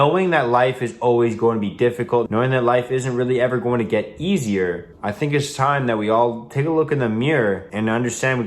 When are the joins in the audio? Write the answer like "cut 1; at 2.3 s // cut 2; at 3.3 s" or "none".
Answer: cut 1; at 2.3 s // cut 2; at 4.9 s // cut 3; at 7.7 s